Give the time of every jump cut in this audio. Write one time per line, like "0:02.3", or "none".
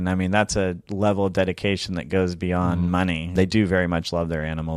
0:03.3